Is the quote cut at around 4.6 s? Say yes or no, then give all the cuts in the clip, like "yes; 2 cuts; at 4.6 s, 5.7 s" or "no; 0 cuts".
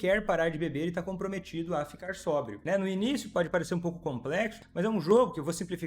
yes; 2 cuts; at 2.6 s, 4.6 s